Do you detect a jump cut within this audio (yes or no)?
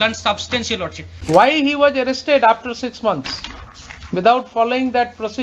yes